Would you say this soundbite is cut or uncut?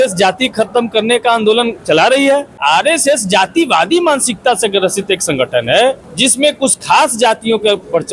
cut